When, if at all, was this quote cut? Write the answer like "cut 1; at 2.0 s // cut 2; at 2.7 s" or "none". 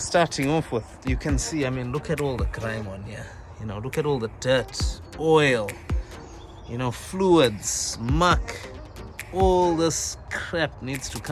cut 1; at 0.9 s